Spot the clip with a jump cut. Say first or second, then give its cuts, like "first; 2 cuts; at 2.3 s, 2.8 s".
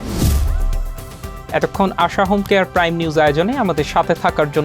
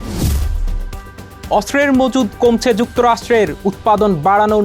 second; 1 cut; at 1.3 s